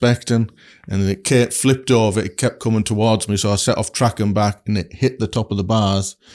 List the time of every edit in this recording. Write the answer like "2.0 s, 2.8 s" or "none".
none

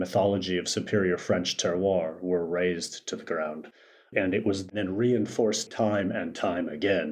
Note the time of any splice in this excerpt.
4.7 s, 5.7 s

